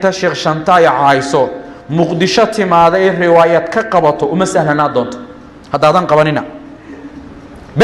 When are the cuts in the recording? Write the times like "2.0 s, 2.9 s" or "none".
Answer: none